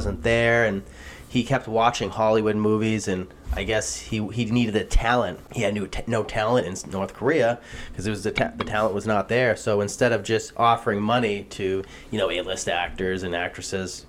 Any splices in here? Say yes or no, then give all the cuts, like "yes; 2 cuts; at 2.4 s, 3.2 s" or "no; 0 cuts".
yes; 1 cut; at 5.4 s